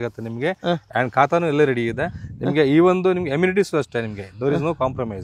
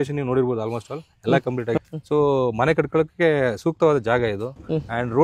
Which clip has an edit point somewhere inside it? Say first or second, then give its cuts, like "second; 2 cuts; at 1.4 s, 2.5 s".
second; 1 cut; at 1.8 s